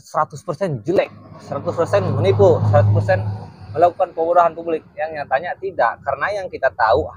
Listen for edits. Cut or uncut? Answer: uncut